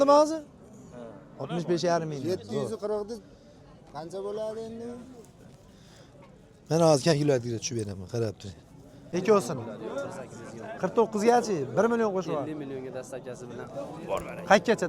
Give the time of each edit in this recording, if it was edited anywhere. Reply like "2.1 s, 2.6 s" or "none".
8.9 s